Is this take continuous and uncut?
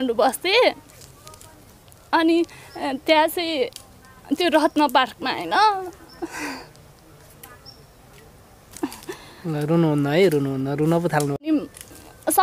no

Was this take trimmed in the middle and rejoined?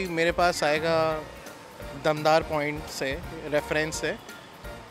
no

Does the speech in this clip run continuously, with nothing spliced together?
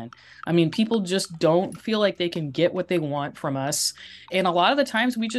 no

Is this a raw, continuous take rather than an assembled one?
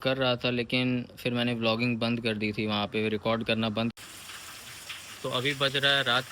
no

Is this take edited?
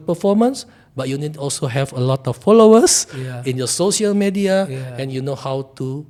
no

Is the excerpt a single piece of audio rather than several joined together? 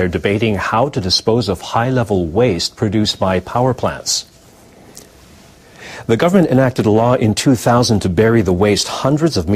yes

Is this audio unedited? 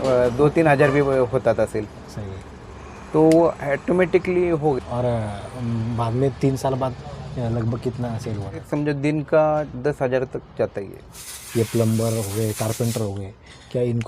no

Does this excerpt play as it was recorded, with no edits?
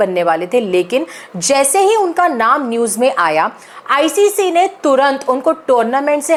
yes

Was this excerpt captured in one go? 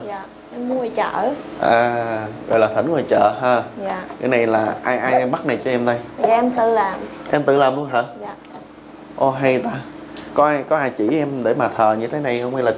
yes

